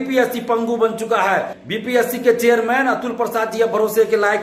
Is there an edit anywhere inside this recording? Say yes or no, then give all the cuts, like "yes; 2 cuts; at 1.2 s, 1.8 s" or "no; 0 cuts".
yes; 1 cut; at 1.6 s